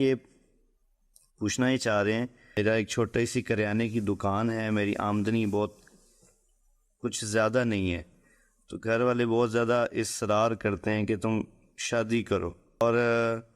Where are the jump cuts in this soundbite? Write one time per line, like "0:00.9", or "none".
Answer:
0:02.4
0:12.8